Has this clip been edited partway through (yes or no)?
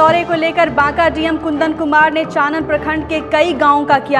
no